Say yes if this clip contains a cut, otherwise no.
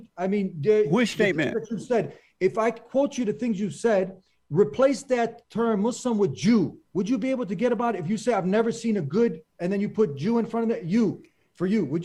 no